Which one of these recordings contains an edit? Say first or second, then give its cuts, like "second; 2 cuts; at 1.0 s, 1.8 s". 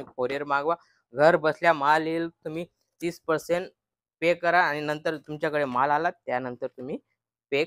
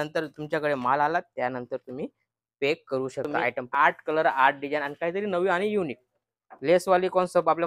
second; 1 cut; at 3.7 s